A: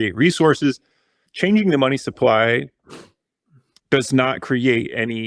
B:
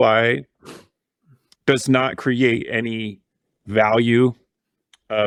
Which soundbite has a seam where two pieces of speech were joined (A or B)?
A